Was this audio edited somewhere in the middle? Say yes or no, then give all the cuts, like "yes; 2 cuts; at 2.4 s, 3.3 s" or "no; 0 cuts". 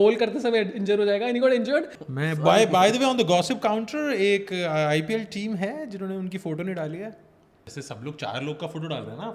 yes; 2 cuts; at 2.0 s, 7.7 s